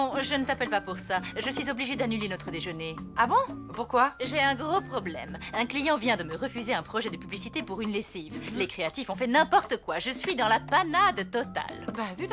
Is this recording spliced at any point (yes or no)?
yes